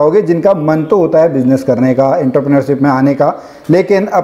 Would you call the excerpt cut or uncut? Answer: uncut